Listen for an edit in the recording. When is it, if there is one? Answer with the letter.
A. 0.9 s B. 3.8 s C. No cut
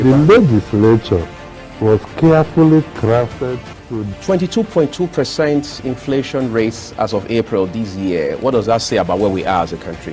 C